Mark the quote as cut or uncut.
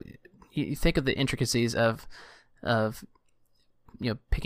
uncut